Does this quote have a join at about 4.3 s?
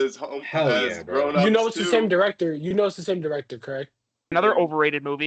yes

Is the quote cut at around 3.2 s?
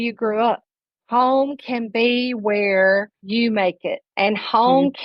yes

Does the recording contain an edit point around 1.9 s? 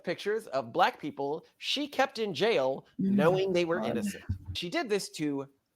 no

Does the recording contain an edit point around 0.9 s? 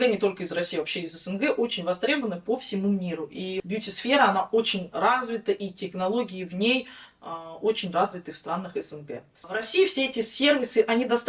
no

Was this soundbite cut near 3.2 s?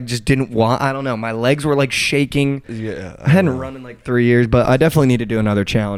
no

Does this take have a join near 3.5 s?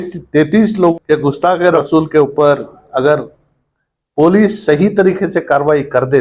no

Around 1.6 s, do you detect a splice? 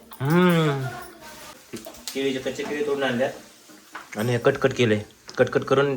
yes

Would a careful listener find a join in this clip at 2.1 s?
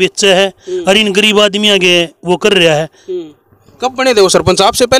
no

